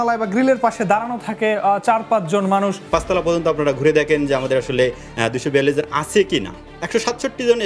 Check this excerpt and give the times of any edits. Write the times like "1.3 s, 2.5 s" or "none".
2.8 s, 6.6 s